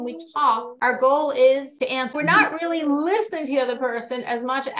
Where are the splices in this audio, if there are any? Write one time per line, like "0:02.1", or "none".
0:02.1